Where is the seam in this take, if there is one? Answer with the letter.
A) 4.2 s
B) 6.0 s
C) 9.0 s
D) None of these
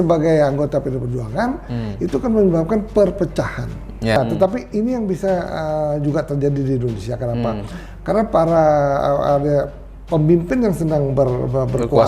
A